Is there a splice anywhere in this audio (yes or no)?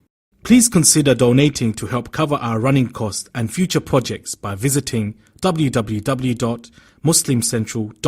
no